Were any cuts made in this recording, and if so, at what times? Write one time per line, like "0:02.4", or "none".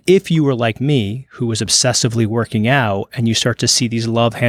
none